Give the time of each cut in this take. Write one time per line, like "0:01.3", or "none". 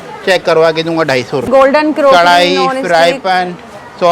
0:01.4